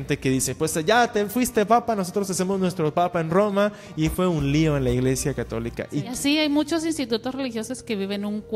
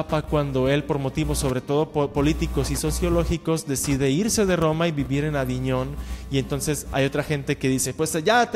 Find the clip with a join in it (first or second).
first